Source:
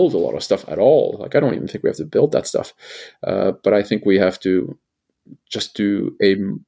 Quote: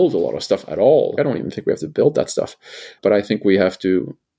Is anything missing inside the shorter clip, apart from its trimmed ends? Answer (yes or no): yes